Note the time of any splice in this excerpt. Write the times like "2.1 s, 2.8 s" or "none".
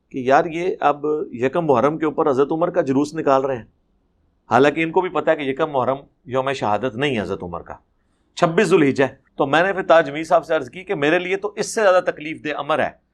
9.2 s